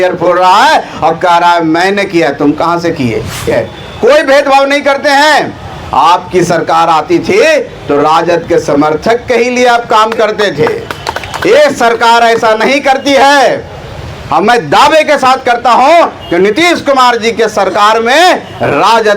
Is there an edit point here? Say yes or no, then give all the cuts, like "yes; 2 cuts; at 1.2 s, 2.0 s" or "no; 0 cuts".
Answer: yes; 1 cut; at 3.5 s